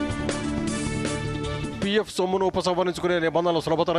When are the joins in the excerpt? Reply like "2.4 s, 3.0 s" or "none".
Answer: 1.6 s